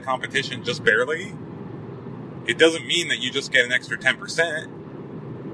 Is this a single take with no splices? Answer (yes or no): yes